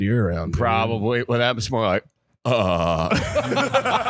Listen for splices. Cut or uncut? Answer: uncut